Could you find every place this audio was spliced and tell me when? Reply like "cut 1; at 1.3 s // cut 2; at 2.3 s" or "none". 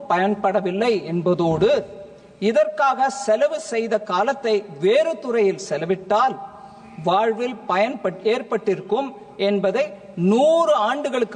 none

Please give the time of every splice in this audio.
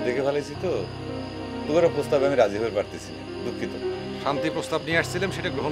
none

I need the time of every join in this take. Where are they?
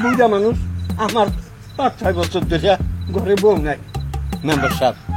none

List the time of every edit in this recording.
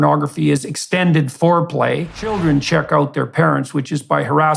cut 1; at 2.3 s

